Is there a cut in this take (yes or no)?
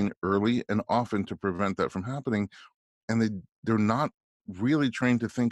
no